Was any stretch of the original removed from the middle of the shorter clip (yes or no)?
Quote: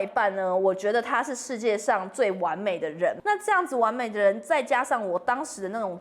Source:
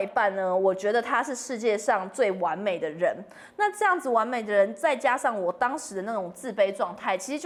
yes